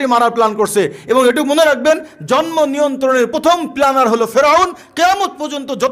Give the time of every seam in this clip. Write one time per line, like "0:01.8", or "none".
none